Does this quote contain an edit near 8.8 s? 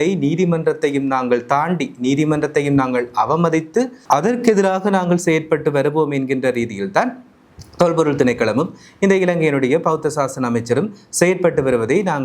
no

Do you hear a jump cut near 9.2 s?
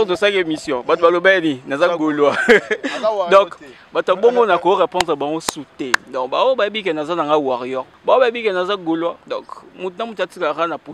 yes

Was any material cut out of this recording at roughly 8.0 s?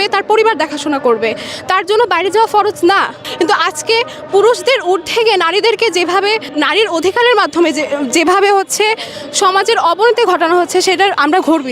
no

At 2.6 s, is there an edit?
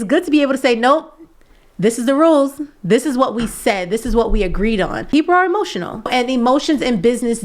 no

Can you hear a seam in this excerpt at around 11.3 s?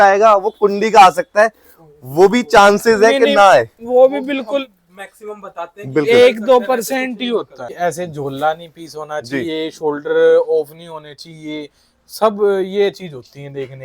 no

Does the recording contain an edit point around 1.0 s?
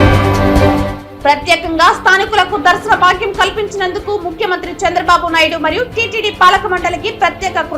yes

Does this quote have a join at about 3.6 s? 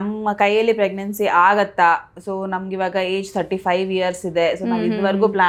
no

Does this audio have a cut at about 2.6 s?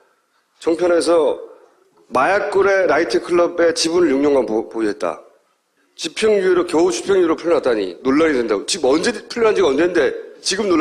no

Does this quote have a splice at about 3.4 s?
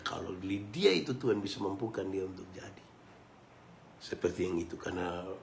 no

